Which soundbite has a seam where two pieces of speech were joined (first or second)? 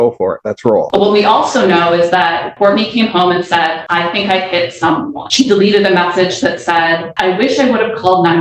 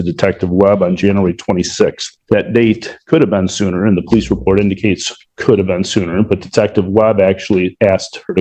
first